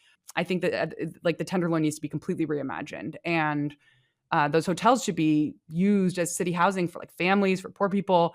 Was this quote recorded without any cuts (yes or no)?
yes